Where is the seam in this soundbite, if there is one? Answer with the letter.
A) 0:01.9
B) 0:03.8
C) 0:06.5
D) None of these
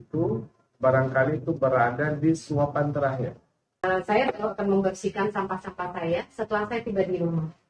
B